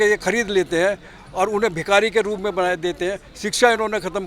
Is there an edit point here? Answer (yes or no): no